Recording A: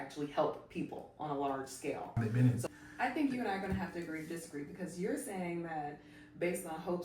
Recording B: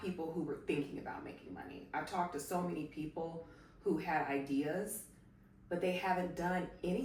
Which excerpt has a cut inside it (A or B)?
A